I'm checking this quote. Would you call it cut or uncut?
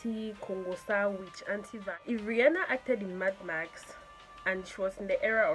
cut